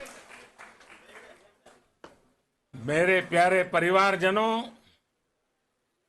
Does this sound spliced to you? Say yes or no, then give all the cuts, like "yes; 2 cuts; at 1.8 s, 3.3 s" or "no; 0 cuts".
yes; 1 cut; at 1.9 s